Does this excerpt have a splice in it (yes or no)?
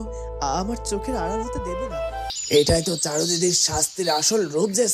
yes